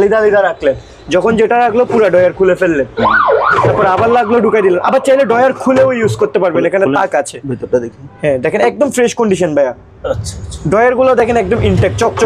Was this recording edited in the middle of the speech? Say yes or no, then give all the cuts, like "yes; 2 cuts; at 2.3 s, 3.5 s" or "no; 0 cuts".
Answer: no; 0 cuts